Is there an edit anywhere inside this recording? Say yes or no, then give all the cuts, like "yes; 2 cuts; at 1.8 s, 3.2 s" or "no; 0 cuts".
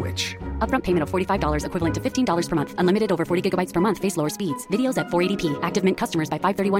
no; 0 cuts